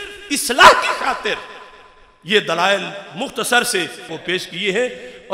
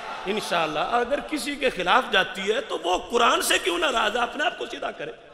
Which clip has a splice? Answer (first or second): first